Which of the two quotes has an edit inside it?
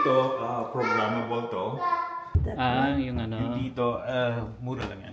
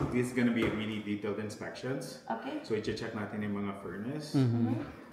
first; 1 cut; at 2.4 s

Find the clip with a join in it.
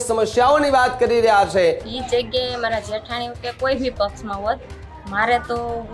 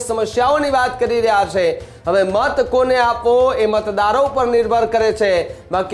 first; 1 cut; at 1.9 s

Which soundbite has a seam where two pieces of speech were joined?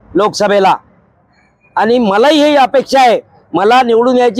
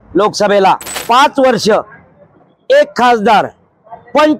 second; 1 cut; at 0.9 s

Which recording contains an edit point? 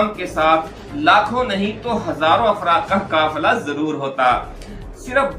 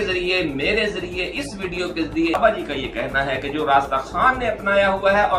second; 1 cut; at 2.4 s

